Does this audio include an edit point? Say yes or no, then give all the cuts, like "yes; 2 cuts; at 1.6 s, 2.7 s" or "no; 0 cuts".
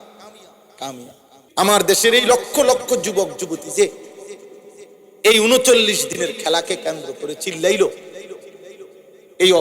yes; 1 cut; at 1.3 s